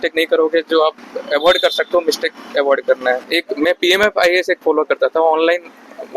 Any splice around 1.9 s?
no; 1 cut; at 3.3 s

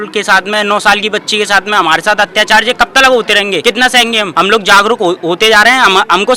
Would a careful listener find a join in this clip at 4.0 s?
yes; 1 cut; at 4.0 s

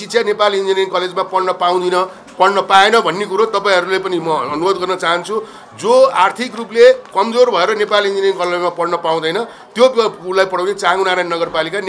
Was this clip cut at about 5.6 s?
no; 0 cuts

